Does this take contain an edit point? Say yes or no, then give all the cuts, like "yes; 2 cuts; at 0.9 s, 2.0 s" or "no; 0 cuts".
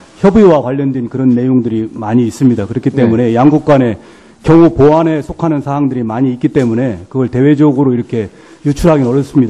yes; 1 cut; at 6.7 s